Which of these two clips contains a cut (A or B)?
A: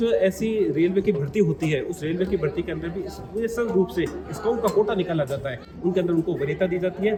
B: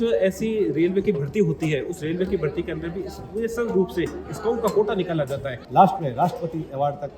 B